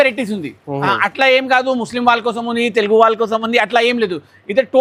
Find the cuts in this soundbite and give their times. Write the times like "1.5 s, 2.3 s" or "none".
none